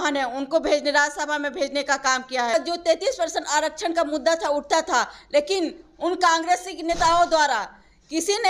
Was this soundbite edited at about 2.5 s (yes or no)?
yes